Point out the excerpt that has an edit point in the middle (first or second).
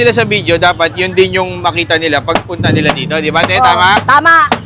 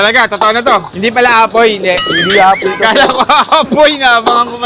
second